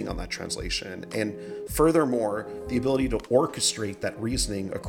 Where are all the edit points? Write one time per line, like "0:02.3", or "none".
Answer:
none